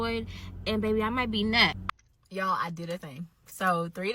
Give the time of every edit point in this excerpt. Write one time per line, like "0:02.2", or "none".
0:01.9